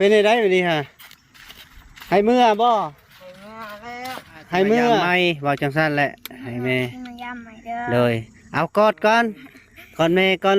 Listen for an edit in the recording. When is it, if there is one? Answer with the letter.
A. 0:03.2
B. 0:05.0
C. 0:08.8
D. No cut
B